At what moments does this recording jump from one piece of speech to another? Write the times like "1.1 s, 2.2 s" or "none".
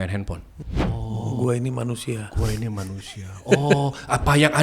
0.9 s